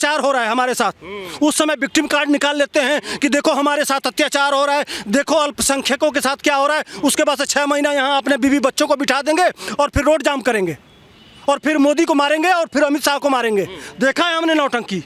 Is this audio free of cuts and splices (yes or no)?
yes